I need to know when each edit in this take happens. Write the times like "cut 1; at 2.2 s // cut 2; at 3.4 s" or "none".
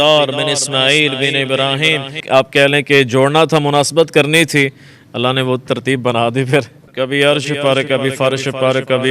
cut 1; at 2.2 s // cut 2; at 6.8 s